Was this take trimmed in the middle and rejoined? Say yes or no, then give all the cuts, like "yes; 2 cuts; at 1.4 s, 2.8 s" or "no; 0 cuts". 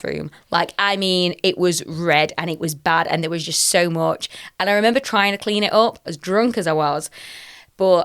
yes; 1 cut; at 6.0 s